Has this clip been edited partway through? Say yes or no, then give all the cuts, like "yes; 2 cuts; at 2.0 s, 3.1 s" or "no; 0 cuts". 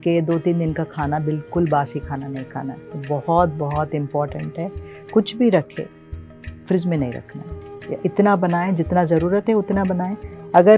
no; 0 cuts